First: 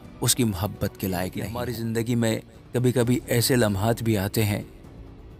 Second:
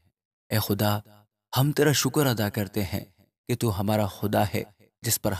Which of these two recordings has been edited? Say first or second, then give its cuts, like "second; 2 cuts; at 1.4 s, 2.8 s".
first; 1 cut; at 1.6 s